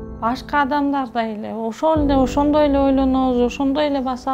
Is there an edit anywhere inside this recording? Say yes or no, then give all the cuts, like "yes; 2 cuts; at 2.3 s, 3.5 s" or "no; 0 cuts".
no; 0 cuts